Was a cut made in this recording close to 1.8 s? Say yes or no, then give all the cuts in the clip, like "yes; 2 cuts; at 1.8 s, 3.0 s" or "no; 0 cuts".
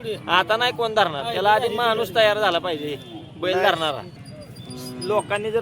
no; 1 cut; at 4.1 s